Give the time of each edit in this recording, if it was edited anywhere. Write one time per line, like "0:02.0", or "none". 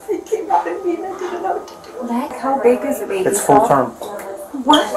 0:02.4

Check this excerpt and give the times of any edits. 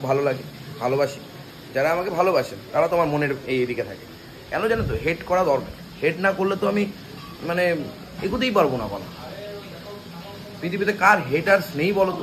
none

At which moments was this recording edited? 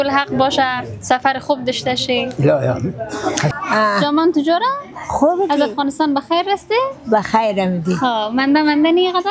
0:03.5

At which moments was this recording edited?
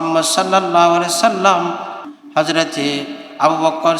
0:02.1

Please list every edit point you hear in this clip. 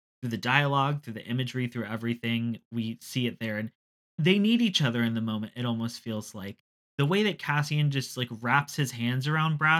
0:03.9
0:06.8

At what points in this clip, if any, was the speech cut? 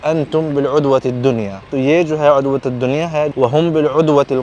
0:01.7
0:03.3

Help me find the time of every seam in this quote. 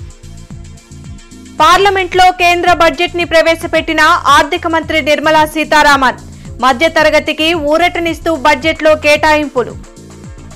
0:01.2

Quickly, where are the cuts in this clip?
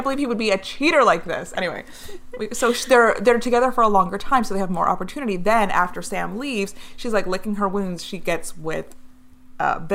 none

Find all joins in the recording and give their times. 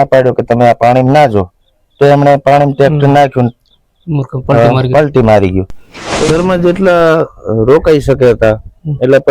0:06.2

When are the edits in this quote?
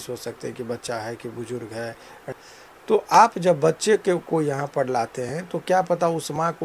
0:02.2

